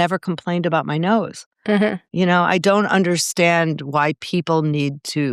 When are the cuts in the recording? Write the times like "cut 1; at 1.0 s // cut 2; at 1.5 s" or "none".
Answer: none